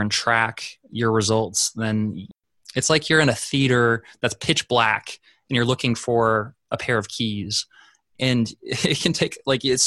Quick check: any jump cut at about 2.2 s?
yes; 1 cut; at 2.2 s

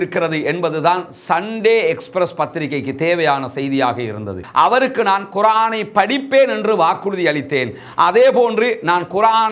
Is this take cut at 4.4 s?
yes; 1 cut; at 4.4 s

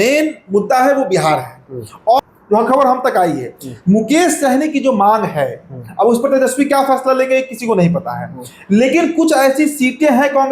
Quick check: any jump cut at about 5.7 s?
no; 1 cut; at 2.2 s

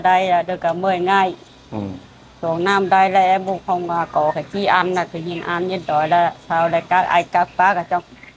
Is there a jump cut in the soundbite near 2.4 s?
no; 0 cuts

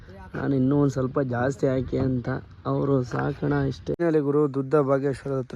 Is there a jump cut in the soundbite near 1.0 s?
no; 1 cut; at 4.0 s

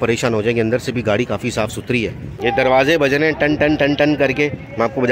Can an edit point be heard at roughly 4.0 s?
no; 1 cut; at 2.3 s

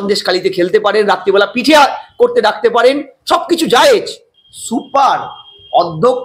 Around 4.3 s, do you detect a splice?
yes; 1 cut; at 4.3 s

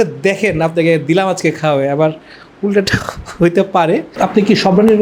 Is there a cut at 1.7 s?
no; 1 cut; at 4.1 s

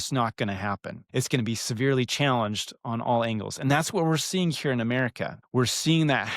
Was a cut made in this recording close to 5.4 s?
yes; 2 cuts; at 0.9 s, 5.4 s

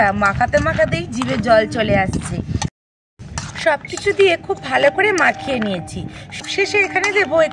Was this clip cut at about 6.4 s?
yes; 2 cuts; at 2.7 s, 6.4 s

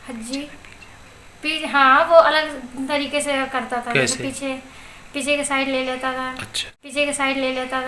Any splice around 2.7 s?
no; 2 cuts; at 4.1 s, 6.9 s

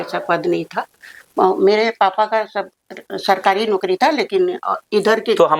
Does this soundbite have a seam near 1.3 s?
no; 0 cuts

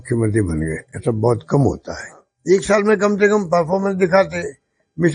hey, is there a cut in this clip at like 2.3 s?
yes; 1 cut; at 2.3 s

